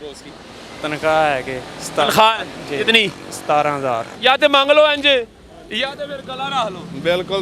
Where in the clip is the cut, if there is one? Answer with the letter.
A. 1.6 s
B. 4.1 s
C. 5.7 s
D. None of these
B